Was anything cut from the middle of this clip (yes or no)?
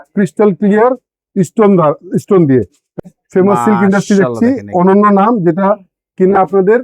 yes